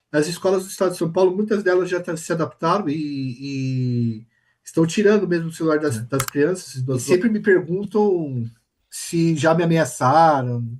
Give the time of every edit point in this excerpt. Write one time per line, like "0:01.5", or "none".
0:07.0

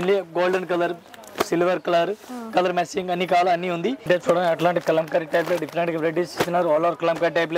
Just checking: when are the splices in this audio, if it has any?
0:04.1

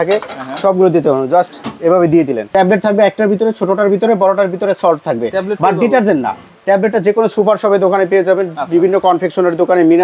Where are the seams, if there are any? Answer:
0:02.5

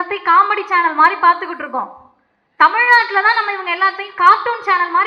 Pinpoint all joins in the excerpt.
none

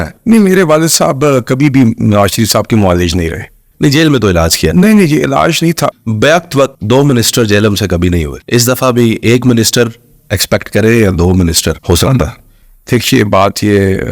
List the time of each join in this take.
0:06.0
0:06.8
0:08.4
0:11.8

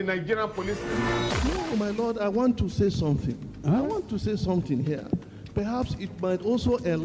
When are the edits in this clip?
none

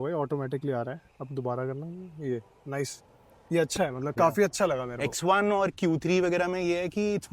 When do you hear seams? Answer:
0:04.8

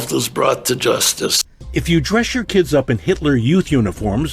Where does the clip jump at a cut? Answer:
0:01.5

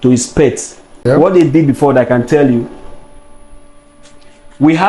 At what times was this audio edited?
0:01.0

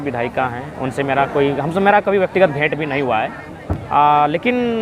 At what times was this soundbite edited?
none

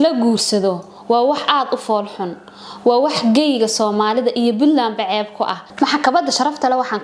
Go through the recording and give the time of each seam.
0:05.7

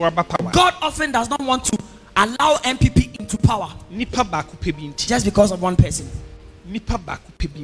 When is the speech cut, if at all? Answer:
none

